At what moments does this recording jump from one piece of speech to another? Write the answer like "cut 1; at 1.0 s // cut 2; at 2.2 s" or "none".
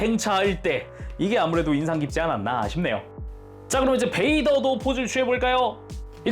cut 1; at 1.0 s // cut 2; at 3.1 s